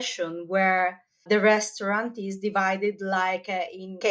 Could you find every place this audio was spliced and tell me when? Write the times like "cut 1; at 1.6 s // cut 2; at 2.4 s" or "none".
none